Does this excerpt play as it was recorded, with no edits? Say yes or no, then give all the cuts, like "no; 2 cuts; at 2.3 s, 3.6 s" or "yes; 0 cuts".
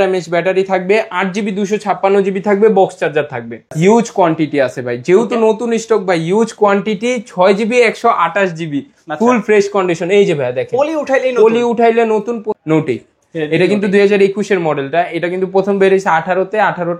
no; 2 cuts; at 3.7 s, 12.5 s